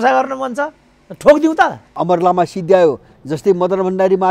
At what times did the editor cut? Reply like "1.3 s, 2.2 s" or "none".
1.9 s